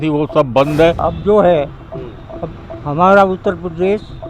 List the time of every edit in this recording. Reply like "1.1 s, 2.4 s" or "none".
1.0 s